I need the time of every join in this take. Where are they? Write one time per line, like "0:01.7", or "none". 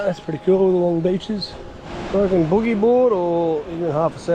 0:02.0